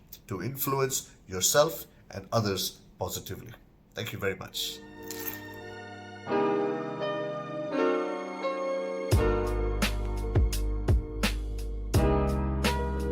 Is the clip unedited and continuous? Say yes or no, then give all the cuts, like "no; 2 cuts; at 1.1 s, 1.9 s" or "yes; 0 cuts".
no; 1 cut; at 5.3 s